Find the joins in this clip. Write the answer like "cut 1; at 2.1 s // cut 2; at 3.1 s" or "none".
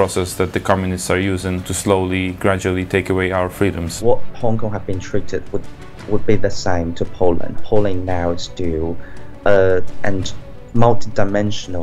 cut 1; at 1.7 s // cut 2; at 4.0 s // cut 3; at 7.6 s